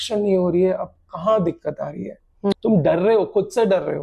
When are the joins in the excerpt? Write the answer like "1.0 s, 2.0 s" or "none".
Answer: 2.6 s